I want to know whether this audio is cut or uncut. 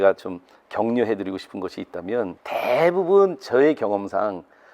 cut